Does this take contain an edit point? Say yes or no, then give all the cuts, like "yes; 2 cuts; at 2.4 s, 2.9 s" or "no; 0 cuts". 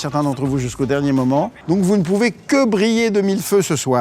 yes; 1 cut; at 1.6 s